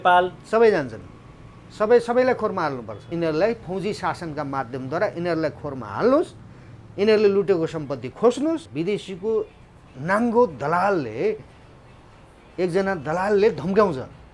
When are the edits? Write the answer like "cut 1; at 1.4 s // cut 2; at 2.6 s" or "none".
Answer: cut 1; at 3.1 s // cut 2; at 8.7 s